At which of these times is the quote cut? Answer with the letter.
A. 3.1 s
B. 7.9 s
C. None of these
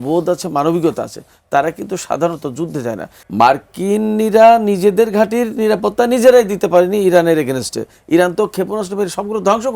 A